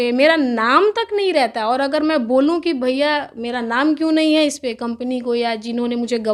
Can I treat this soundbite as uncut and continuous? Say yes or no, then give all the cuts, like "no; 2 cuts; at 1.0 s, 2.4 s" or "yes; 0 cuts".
yes; 0 cuts